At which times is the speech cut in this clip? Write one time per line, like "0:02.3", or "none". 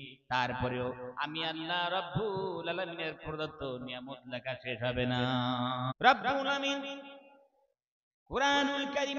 0:05.9

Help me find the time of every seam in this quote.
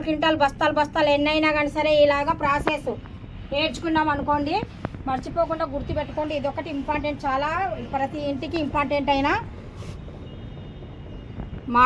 none

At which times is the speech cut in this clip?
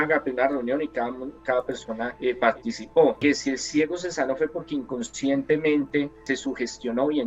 0:02.1
0:03.2
0:06.2

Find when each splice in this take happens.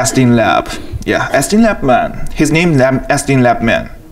0:02.6

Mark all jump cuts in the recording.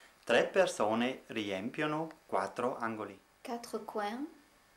0:03.3

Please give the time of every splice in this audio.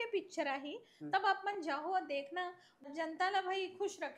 0:02.7

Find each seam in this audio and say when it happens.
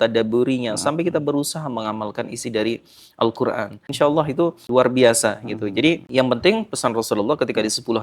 0:03.8
0:04.6
0:06.0

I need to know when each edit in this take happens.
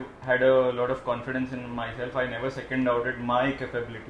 none

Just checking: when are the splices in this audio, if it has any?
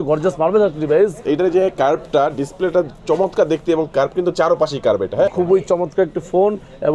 0:01.2
0:05.3

